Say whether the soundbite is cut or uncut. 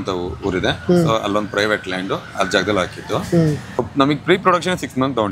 cut